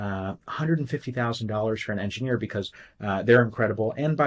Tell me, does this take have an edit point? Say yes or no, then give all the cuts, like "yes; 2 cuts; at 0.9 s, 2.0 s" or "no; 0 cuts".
no; 0 cuts